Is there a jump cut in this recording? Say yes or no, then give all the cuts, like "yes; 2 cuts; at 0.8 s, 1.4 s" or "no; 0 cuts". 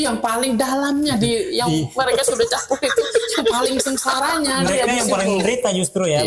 no; 0 cuts